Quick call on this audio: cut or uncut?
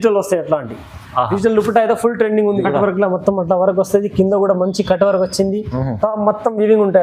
cut